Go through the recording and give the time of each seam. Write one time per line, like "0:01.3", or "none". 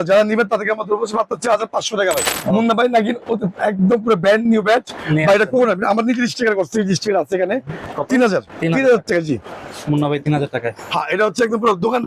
0:02.2
0:07.9